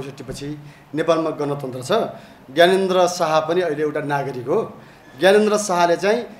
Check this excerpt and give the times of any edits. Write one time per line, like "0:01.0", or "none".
none